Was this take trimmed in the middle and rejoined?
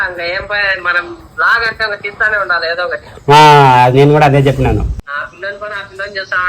yes; 1 cut; at 5.0 s

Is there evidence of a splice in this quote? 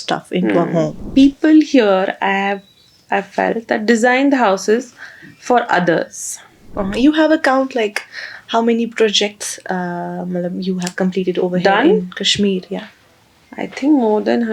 yes; 2 cuts; at 1.0 s, 6.7 s

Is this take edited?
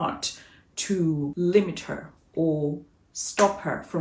yes; 1 cut; at 1.3 s

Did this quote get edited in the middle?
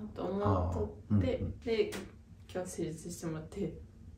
yes; 1 cut; at 1.6 s

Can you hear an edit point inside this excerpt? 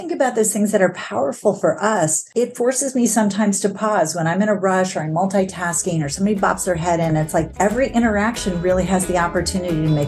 yes; 2 cuts; at 2.2 s, 7.5 s

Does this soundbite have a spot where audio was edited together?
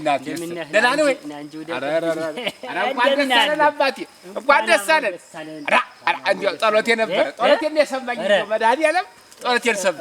no; 0 cuts

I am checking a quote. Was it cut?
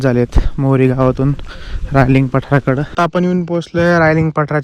yes; 1 cut; at 2.9 s

